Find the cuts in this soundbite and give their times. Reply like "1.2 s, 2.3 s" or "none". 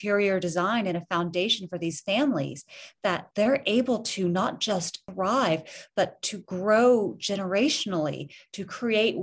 3.3 s, 5.0 s